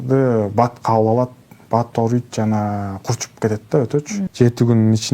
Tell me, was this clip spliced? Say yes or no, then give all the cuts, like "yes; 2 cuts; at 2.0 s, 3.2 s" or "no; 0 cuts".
yes; 1 cut; at 4.2 s